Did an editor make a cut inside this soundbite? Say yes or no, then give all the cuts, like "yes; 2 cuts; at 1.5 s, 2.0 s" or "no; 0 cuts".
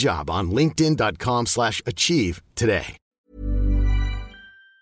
no; 0 cuts